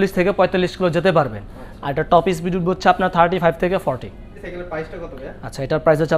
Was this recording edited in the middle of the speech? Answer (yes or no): yes